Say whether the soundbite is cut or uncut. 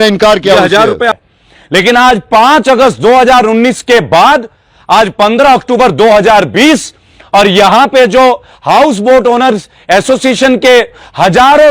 cut